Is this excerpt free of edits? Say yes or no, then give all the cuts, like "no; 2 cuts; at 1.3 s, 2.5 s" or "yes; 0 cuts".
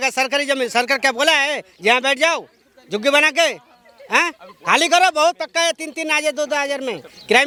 yes; 0 cuts